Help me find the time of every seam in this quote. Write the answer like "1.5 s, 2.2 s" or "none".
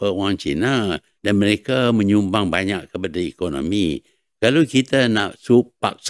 1.1 s